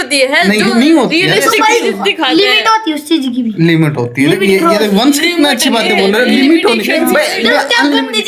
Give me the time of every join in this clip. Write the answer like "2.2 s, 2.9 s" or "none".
none